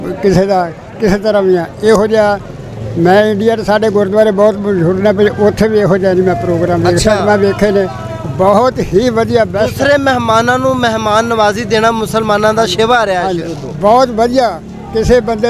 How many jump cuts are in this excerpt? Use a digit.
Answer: 0